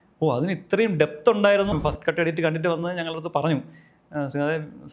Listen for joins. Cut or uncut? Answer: cut